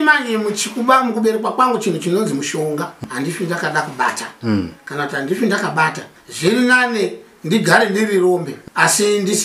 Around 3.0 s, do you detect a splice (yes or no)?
yes